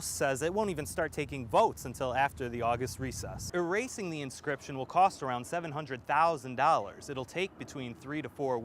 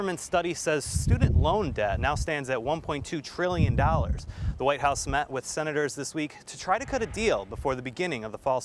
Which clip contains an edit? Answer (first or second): first